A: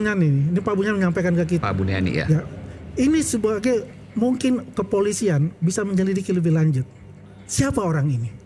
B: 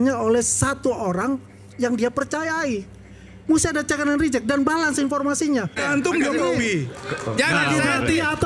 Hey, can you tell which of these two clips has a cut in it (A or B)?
B